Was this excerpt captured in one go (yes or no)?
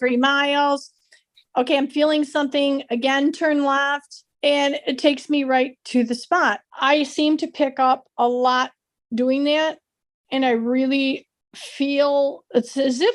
no